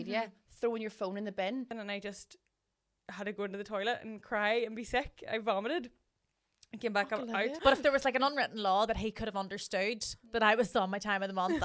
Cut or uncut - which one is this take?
cut